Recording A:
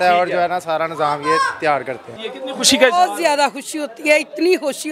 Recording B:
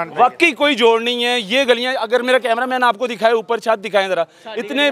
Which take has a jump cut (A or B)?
A